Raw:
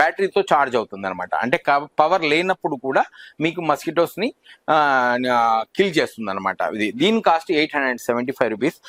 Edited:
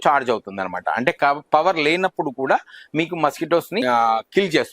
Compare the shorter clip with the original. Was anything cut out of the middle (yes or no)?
yes